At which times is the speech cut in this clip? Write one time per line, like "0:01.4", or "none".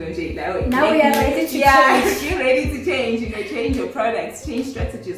none